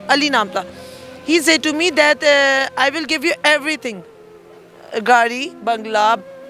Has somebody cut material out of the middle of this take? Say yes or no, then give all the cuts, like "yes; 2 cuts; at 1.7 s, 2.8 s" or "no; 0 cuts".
no; 0 cuts